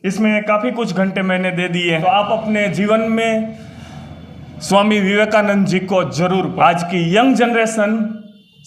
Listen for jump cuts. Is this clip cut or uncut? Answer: cut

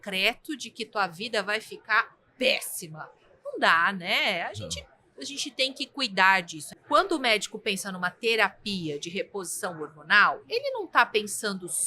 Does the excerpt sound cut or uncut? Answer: cut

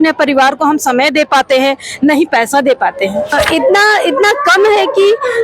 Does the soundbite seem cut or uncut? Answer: cut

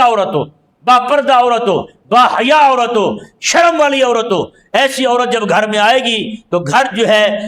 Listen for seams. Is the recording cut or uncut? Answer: uncut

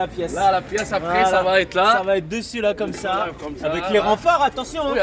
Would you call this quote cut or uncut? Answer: uncut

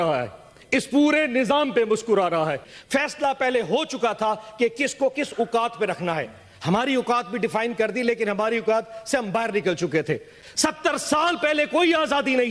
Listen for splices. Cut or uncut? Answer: cut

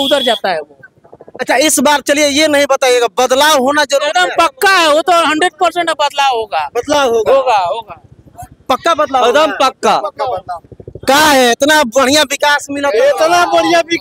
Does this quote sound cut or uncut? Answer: uncut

